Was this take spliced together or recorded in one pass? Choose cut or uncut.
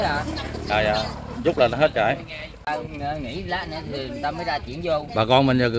cut